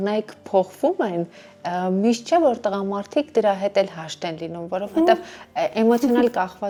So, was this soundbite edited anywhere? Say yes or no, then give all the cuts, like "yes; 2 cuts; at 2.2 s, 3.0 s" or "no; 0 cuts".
no; 0 cuts